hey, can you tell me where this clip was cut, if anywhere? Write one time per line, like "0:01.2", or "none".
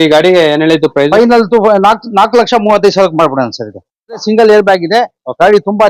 0:04.2